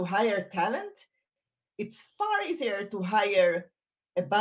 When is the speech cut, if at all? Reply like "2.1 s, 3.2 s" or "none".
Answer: none

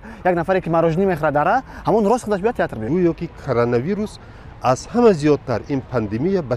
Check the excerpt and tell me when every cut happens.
2.8 s

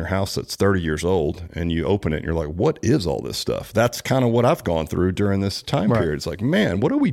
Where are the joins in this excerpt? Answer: none

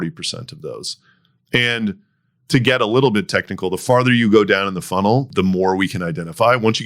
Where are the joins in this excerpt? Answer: 5.3 s

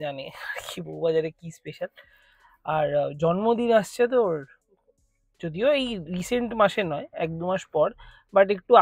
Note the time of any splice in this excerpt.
none

